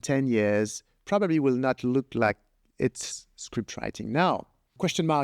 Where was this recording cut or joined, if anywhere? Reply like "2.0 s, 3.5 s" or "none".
none